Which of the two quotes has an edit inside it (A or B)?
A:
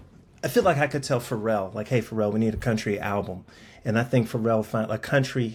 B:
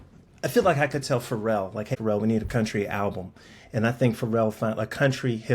B